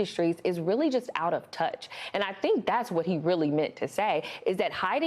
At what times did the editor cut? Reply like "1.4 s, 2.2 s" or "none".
none